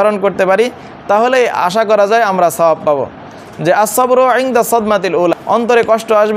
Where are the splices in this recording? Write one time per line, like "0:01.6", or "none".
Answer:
0:05.4